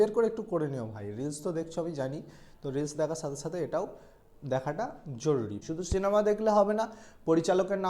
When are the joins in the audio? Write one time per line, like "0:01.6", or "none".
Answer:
0:05.6